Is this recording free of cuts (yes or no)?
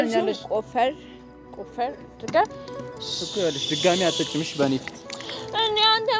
yes